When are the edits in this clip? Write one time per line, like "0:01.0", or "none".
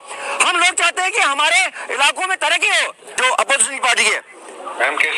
0:03.2